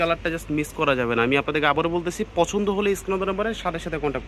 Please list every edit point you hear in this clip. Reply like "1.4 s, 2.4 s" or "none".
none